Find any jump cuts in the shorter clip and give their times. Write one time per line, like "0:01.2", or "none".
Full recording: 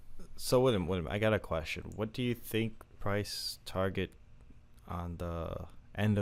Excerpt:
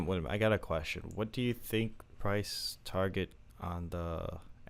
0:03.5